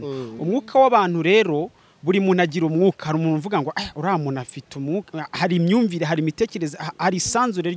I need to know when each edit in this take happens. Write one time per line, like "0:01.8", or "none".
none